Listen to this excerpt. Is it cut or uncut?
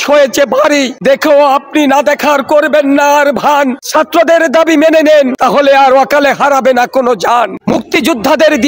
cut